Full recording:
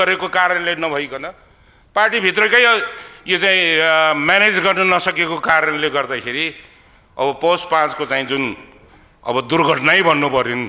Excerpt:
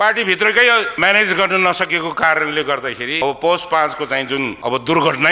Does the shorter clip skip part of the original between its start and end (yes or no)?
yes